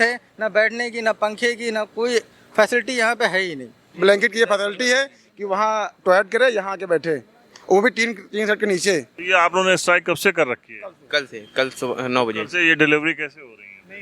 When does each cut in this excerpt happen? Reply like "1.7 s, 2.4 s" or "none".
3.9 s, 9.1 s

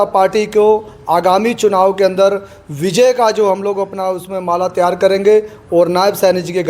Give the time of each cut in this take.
none

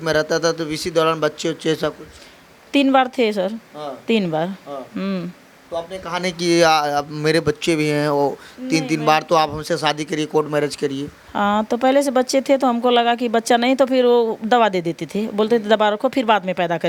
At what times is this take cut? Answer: none

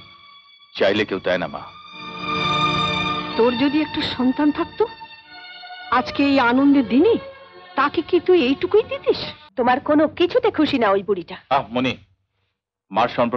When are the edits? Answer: 9.4 s

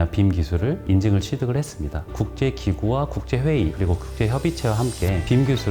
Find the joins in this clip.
none

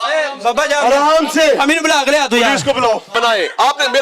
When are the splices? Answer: 3.1 s

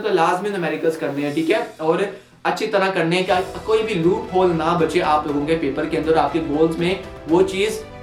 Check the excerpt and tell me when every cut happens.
none

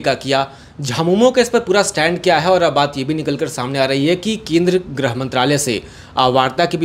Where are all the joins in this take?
none

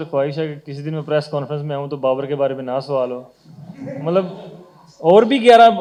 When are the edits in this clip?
none

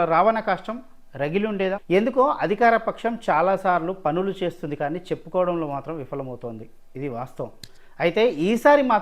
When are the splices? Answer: 1.8 s

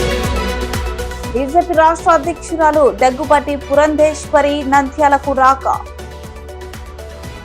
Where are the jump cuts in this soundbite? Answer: 1.2 s

